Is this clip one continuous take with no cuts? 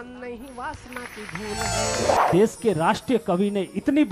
no; 1 cut; at 2.1 s

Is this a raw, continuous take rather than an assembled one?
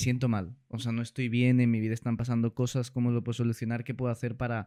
yes; 0 cuts

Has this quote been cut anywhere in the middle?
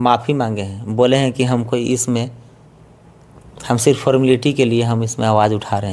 no; 0 cuts

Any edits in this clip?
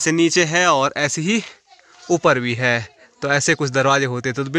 no; 0 cuts

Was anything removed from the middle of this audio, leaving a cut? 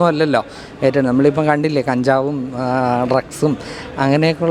no; 0 cuts

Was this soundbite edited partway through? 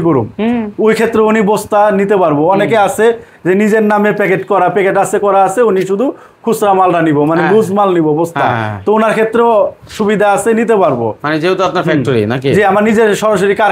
no; 0 cuts

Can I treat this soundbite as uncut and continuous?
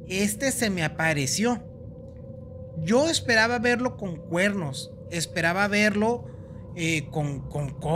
yes; 0 cuts

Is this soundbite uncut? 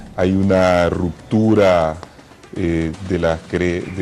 no; 1 cut; at 1.8 s

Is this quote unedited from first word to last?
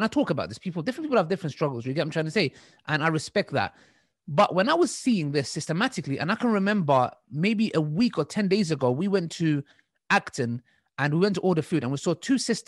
yes; 0 cuts

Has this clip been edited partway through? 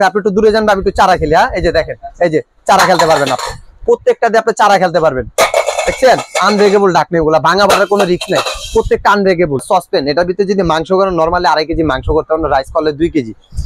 yes; 1 cut; at 9.6 s

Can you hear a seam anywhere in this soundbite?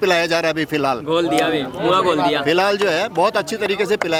no; 0 cuts

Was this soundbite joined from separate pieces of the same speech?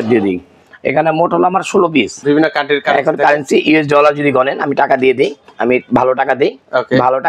yes; 1 cut; at 2.2 s

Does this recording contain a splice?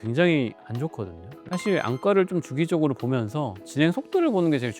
yes; 1 cut; at 1.3 s

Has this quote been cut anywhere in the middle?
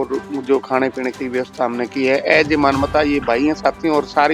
no; 0 cuts

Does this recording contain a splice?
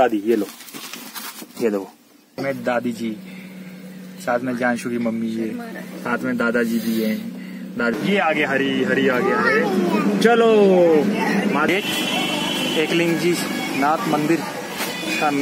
yes; 3 cuts; at 2.4 s, 7.9 s, 11.7 s

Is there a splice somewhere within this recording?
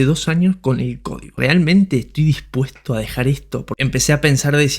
yes; 2 cuts; at 1.3 s, 3.7 s

